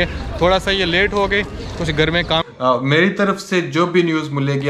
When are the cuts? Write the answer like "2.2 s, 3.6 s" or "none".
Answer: 2.4 s